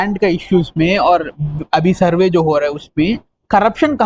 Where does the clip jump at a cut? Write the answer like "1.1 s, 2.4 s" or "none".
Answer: none